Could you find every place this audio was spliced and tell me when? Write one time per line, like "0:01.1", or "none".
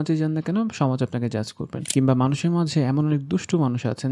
0:01.9

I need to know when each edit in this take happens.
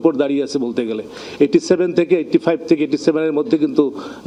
none

